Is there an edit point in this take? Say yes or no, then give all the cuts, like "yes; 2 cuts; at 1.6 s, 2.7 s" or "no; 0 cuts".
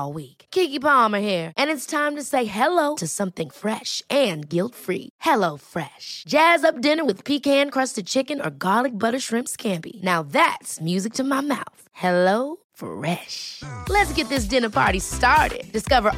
no; 0 cuts